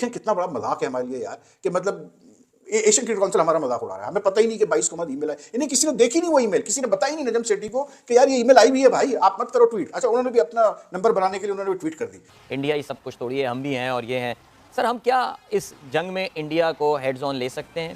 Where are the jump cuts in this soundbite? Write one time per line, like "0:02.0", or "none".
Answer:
none